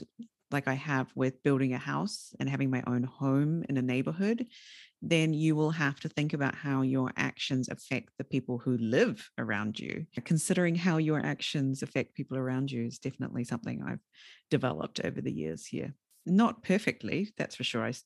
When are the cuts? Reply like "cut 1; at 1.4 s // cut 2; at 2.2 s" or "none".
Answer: cut 1; at 10.1 s

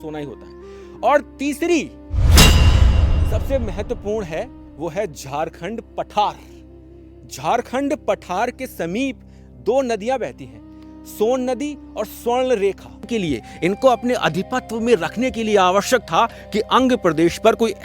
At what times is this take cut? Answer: cut 1; at 13.1 s

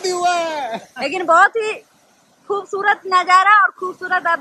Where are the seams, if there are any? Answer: none

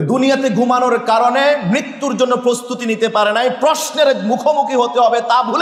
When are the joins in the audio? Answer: none

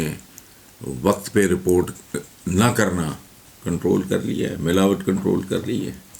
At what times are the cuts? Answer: none

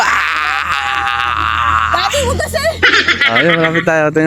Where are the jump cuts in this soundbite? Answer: none

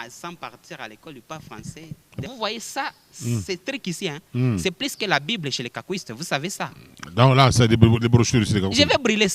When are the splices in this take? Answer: cut 1; at 2.1 s

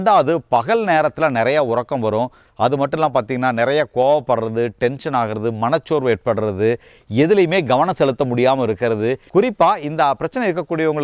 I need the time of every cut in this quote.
cut 1; at 2.4 s // cut 2; at 9.2 s

